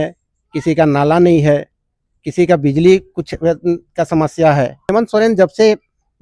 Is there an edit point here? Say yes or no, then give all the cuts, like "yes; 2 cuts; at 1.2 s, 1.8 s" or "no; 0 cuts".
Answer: yes; 1 cut; at 4.8 s